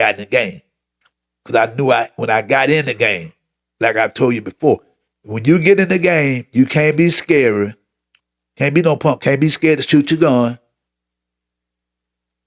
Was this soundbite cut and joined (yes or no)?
no